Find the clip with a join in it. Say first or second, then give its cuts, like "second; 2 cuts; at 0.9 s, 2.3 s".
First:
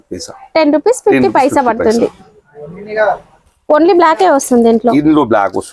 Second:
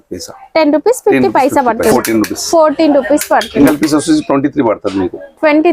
second; 2 cuts; at 1.9 s, 3.5 s